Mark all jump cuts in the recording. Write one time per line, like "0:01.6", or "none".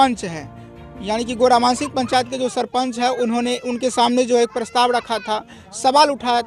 none